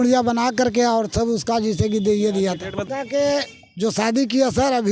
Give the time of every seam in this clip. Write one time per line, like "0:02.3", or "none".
0:02.9